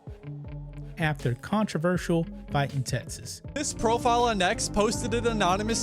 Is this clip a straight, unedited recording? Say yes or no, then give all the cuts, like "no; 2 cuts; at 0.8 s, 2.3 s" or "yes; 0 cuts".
no; 1 cut; at 3.4 s